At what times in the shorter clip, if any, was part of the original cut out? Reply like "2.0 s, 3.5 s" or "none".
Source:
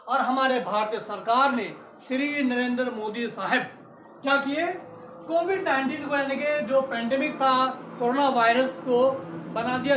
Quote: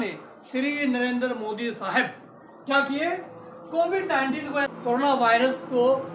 4.7 s